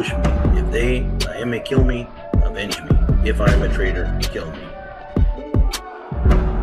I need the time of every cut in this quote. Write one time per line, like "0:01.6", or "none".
0:04.8